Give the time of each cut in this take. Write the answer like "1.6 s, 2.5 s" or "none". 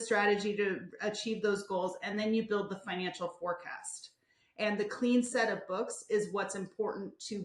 none